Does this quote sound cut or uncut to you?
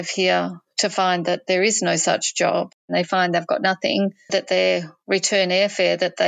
cut